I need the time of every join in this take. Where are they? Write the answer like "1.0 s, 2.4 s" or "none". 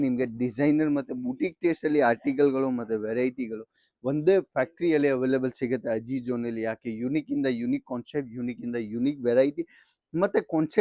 none